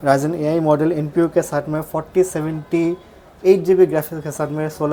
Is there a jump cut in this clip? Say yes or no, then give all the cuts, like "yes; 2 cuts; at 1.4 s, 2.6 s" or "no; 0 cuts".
no; 0 cuts